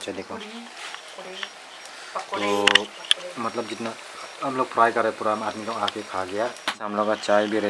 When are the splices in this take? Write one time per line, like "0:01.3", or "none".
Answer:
0:06.7